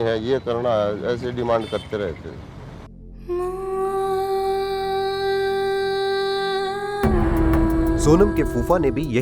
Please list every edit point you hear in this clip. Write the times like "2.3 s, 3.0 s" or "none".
none